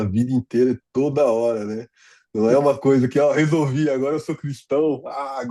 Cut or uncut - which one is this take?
uncut